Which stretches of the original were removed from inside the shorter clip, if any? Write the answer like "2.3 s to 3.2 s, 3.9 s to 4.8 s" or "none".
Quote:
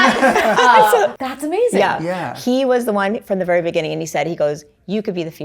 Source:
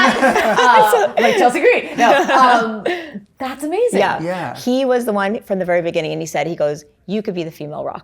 1.1 s to 3.3 s